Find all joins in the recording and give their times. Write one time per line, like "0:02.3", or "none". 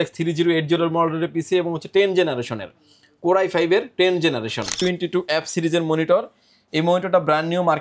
0:04.7